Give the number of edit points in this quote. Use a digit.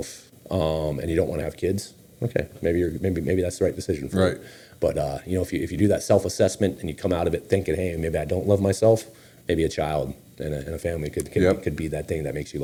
0